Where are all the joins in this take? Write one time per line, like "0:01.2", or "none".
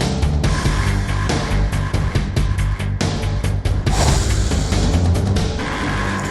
none